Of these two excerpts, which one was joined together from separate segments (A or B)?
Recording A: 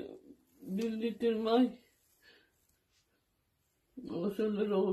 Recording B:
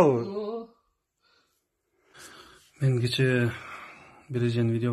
B